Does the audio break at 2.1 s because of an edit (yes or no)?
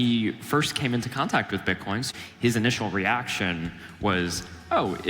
yes